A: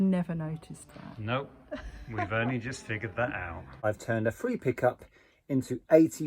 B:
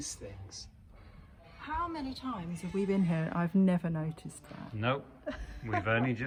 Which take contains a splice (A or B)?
A